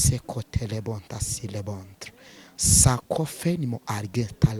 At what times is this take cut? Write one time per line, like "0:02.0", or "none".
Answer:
none